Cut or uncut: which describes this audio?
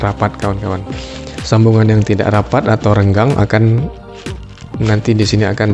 cut